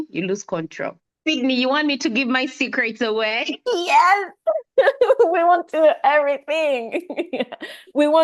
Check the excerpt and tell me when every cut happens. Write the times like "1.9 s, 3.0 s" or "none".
1.1 s